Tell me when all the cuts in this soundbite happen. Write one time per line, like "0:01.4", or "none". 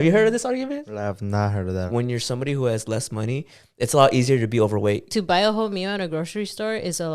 0:02.0